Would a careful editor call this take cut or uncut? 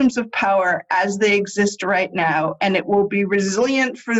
uncut